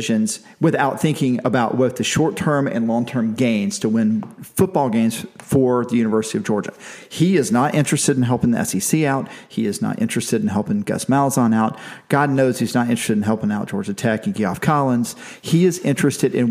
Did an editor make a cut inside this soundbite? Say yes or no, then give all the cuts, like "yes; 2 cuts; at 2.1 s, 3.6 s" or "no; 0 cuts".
no; 0 cuts